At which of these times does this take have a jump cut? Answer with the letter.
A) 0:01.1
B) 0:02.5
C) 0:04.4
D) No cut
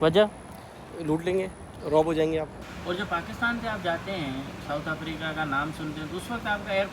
B